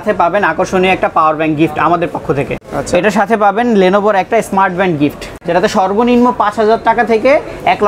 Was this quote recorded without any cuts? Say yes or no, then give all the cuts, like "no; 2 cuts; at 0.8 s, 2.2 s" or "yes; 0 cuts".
no; 2 cuts; at 2.5 s, 5.3 s